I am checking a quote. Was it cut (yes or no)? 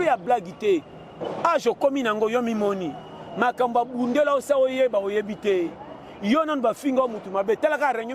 no